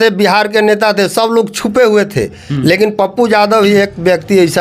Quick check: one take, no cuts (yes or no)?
yes